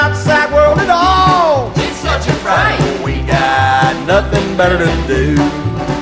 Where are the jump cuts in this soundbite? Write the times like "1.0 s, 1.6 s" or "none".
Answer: none